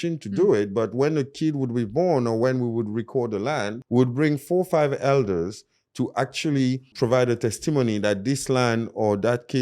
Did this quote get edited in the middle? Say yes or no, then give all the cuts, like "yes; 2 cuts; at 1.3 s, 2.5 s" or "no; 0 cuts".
yes; 2 cuts; at 3.8 s, 6.9 s